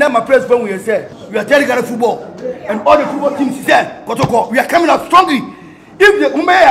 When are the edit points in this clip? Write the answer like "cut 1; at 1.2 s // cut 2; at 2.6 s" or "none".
cut 1; at 1.2 s